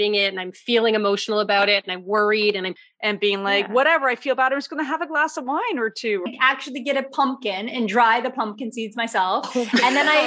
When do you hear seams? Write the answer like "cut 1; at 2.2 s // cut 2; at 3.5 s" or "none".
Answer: cut 1; at 2.8 s // cut 2; at 6.3 s